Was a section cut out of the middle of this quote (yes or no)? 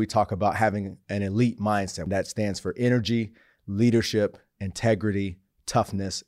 yes